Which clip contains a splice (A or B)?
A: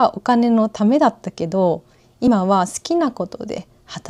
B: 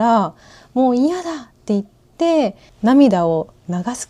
B